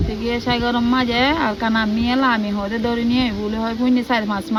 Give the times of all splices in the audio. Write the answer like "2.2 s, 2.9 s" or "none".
none